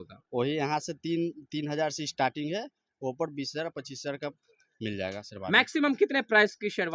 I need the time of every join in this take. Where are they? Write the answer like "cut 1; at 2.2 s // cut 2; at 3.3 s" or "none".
none